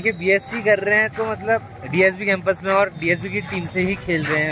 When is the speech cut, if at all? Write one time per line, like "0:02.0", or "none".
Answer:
none